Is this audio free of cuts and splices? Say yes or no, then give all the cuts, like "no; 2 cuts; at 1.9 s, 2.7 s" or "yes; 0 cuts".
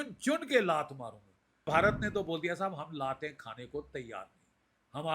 no; 1 cut; at 1.7 s